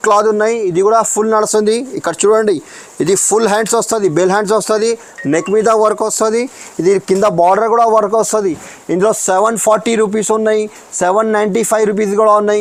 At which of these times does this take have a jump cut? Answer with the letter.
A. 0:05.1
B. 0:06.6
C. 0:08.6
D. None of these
D